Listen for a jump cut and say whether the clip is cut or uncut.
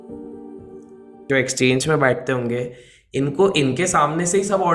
cut